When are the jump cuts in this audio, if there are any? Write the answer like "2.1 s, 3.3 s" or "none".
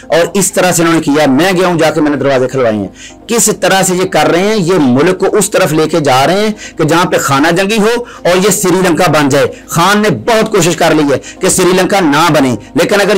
none